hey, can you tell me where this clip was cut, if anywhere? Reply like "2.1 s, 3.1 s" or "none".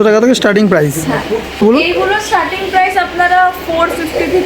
1.6 s